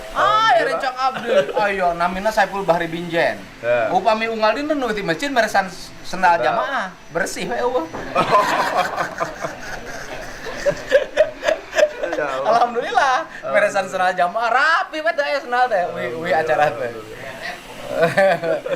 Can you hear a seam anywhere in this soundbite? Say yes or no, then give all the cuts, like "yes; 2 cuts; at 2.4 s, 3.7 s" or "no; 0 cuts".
no; 0 cuts